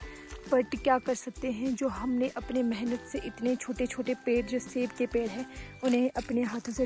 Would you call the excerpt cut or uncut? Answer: uncut